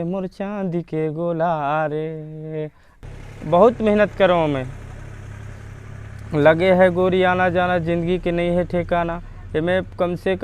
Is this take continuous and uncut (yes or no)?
no